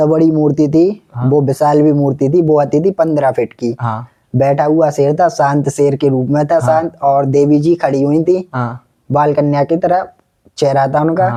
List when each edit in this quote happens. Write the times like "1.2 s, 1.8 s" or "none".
none